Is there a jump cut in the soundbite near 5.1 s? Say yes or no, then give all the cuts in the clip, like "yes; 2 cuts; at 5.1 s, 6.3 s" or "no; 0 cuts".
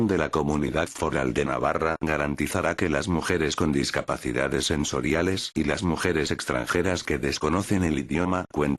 no; 2 cuts; at 1.4 s, 2.9 s